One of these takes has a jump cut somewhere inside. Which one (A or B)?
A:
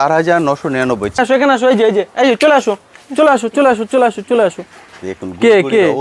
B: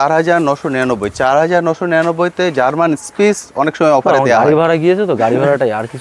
A